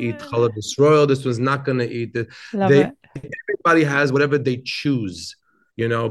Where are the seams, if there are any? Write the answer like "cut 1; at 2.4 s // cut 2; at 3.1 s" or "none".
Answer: none